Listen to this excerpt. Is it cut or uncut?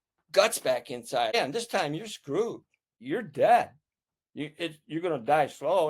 cut